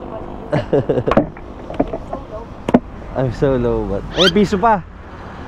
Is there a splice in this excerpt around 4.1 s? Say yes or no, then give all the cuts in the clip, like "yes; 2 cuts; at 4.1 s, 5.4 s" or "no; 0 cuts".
yes; 1 cut; at 4.1 s